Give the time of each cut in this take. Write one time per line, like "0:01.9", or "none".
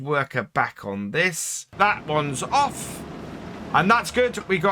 0:01.7